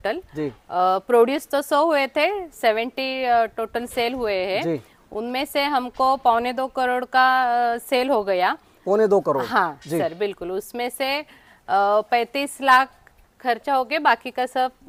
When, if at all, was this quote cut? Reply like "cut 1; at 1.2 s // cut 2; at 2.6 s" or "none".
none